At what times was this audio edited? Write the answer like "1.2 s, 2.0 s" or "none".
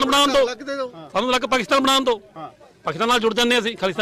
none